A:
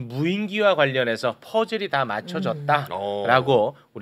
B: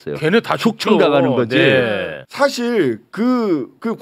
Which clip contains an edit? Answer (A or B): B